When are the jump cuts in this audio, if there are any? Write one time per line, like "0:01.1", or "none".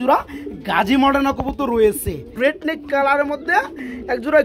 0:02.4